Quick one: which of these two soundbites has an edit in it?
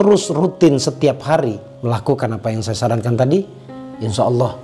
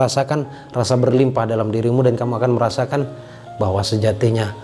first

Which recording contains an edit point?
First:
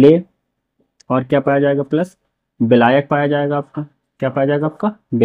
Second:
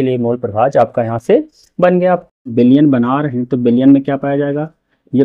second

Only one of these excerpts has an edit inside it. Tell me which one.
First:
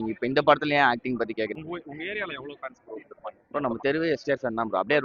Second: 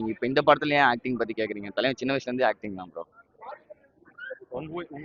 first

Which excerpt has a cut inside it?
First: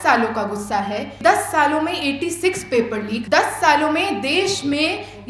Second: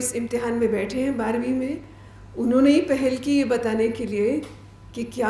first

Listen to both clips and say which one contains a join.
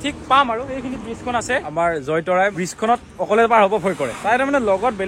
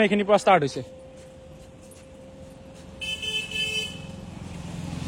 first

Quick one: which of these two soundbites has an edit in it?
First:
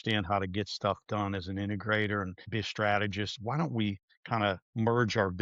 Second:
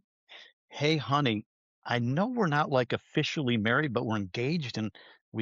first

